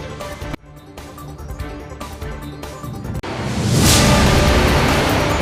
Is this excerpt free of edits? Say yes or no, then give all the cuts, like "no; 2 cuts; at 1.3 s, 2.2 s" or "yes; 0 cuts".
yes; 0 cuts